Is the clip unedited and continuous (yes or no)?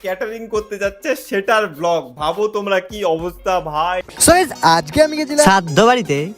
no